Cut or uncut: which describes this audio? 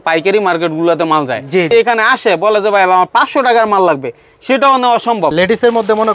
cut